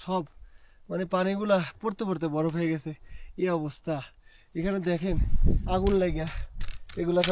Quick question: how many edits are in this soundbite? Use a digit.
0